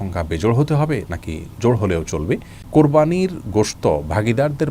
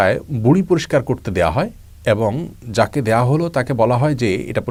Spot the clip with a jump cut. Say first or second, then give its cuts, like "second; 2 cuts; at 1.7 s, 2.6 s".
first; 1 cut; at 2.6 s